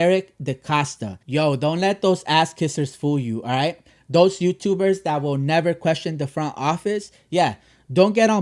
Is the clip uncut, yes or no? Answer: no